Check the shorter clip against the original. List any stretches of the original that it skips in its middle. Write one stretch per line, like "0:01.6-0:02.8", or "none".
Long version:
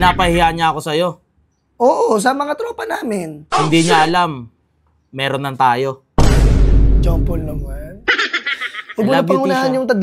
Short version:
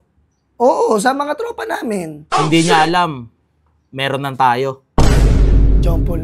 none

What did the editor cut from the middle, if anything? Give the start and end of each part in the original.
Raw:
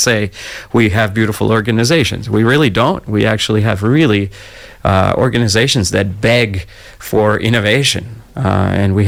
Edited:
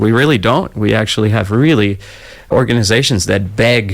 0:04.8-0:05.1

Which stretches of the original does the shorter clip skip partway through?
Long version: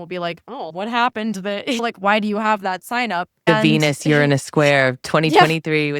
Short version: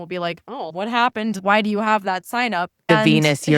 0:01.4-0:02.0

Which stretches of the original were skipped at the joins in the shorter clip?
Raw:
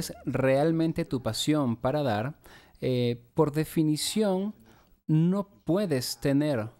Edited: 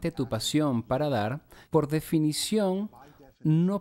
0:02.5-0:03.2

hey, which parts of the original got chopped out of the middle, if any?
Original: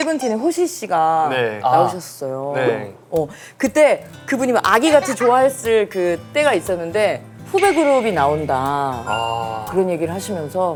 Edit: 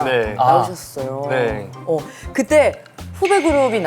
0:04.2-0:07.3

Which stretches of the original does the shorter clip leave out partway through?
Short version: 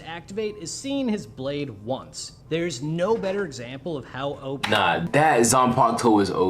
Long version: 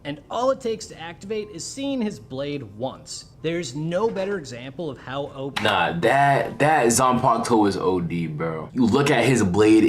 0:06.0-0:06.5

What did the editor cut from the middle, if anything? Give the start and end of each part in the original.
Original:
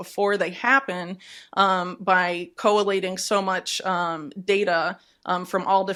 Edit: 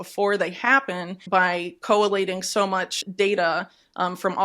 0:01.2-0:01.9
0:03.7-0:04.3

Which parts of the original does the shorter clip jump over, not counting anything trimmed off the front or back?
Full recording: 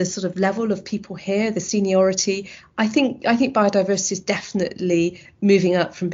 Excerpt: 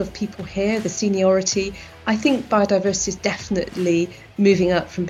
0:03.2-0:03.5

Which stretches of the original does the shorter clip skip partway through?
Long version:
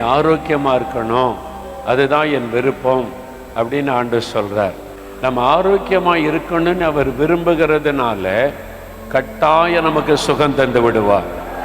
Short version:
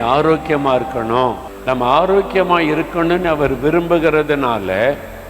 0:01.5-0:05.0

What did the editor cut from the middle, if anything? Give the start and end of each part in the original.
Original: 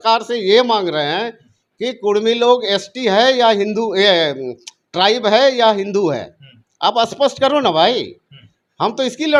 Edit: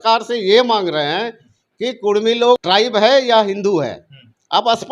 0:02.6-0:04.9

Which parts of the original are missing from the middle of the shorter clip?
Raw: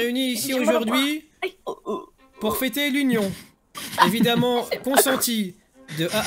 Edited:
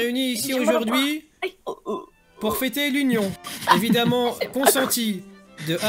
0:03.5-0:03.8

